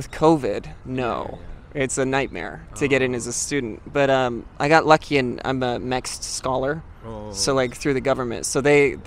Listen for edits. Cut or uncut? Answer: uncut